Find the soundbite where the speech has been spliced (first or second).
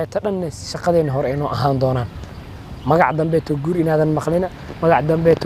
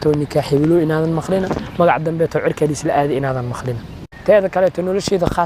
second